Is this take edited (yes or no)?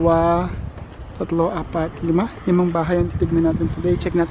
no